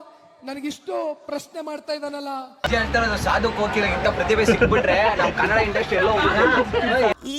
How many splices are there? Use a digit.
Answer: 1